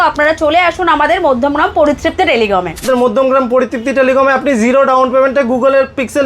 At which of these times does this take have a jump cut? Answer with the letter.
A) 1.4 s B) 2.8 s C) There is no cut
B